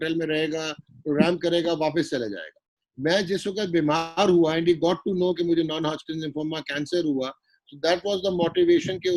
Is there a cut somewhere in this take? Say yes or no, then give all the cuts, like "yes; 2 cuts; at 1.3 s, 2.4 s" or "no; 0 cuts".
no; 0 cuts